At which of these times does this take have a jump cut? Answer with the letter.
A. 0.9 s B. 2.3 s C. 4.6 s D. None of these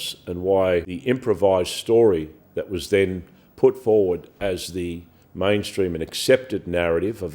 A